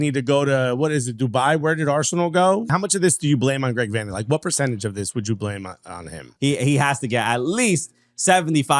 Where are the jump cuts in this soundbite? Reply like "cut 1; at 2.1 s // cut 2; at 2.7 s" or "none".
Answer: cut 1; at 2.7 s // cut 2; at 6.3 s